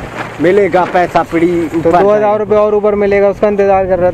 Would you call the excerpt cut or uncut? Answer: uncut